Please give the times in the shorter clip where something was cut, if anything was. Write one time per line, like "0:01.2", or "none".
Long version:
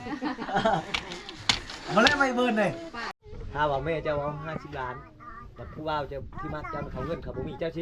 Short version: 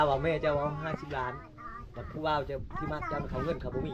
none

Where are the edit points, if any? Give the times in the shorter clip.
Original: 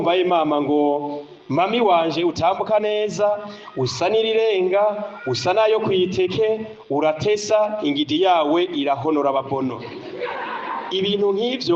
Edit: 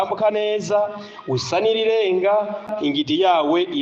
0:02.7

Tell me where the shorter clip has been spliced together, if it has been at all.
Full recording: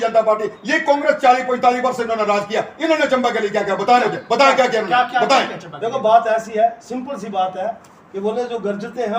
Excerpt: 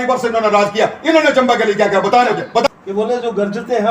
0:02.7

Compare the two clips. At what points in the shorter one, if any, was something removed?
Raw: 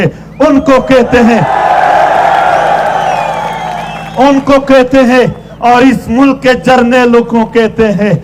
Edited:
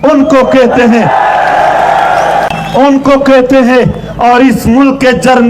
0:02.5

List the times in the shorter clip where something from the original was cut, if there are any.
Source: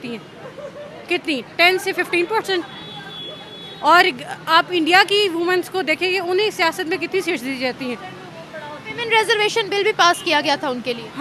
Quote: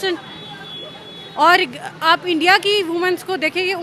none

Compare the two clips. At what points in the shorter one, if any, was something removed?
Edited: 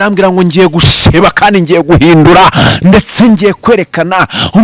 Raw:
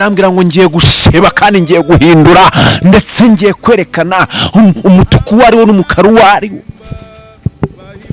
none

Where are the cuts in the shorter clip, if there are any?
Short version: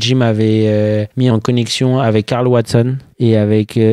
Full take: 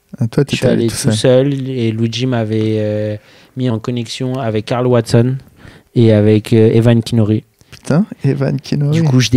0:01.1
0:03.0

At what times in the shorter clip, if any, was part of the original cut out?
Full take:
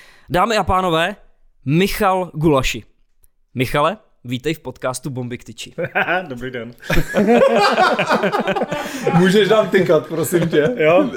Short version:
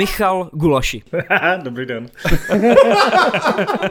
0:01.0

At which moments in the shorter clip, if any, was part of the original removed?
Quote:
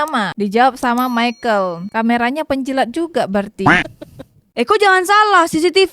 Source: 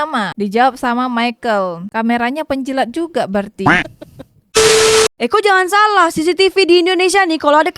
0:04.5

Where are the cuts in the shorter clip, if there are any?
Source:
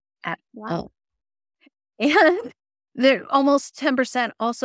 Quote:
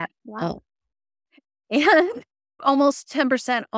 0:02.6

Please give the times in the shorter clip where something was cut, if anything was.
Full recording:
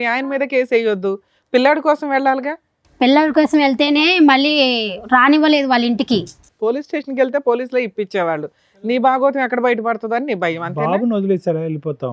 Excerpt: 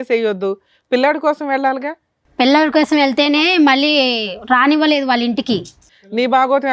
0:05.8

